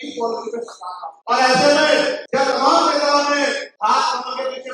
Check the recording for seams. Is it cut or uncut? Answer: cut